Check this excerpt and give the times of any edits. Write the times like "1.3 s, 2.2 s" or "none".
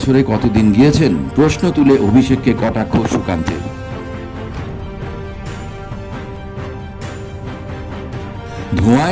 none